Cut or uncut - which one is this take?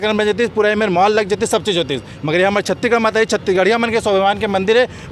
uncut